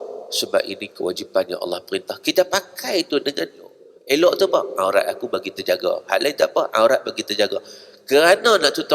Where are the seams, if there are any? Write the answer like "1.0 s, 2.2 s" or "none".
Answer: 3.9 s